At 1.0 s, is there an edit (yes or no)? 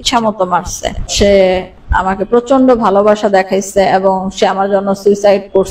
yes